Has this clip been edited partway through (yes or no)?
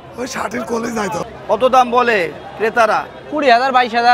yes